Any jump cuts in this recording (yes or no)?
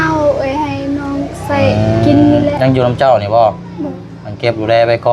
no